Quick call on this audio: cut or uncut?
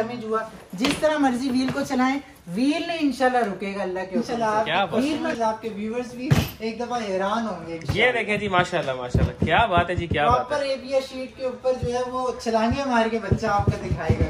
cut